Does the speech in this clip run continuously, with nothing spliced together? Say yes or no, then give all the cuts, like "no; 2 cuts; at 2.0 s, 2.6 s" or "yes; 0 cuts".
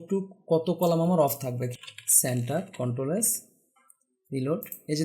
no; 1 cut; at 1.6 s